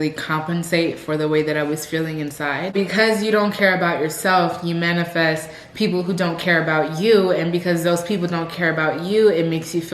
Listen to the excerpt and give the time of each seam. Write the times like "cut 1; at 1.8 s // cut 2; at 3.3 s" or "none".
cut 1; at 2.7 s